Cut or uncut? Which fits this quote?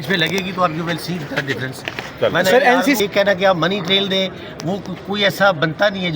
cut